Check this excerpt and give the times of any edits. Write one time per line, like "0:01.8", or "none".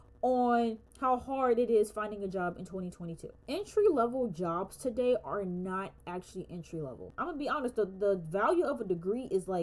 0:03.3
0:07.0